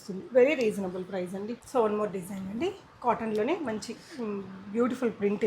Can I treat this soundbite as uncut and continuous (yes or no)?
no